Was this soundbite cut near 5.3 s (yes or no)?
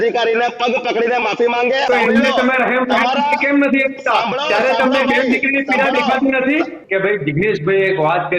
no